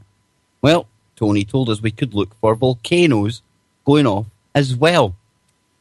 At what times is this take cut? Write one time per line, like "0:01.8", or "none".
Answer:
0:04.7